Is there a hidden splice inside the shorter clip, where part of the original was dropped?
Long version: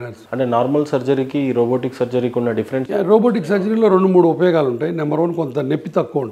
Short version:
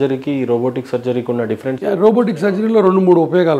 no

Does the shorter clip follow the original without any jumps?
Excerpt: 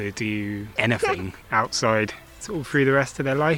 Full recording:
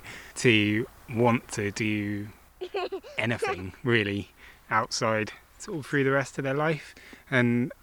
no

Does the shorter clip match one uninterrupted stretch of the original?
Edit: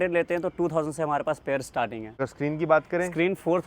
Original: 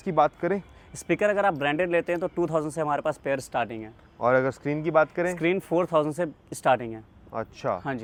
no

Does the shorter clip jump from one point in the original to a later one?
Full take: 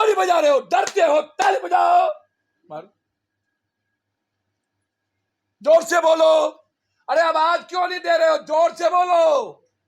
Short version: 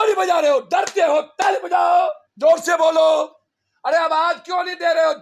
yes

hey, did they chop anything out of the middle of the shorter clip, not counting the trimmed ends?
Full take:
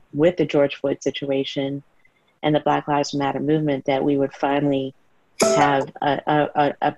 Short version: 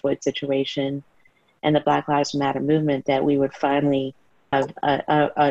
yes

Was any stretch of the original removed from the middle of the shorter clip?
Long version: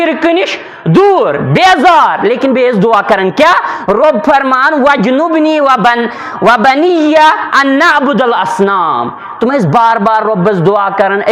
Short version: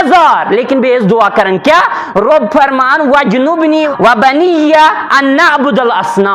yes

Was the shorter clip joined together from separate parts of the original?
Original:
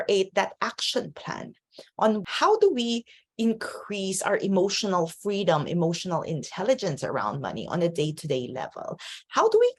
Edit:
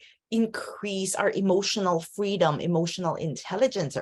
no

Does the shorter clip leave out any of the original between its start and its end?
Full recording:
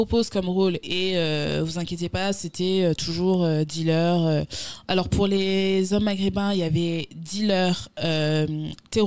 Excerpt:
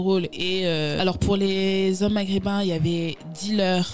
yes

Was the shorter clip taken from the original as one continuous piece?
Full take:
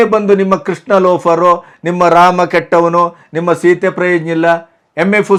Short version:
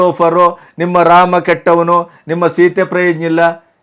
yes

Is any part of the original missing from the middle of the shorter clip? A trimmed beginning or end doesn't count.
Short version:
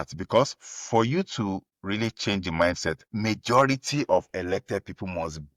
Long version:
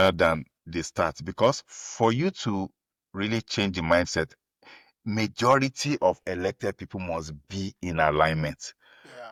yes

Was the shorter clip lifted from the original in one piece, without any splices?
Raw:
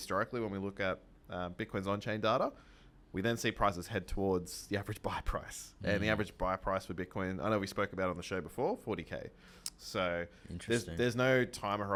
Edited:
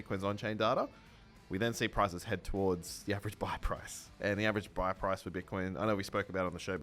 yes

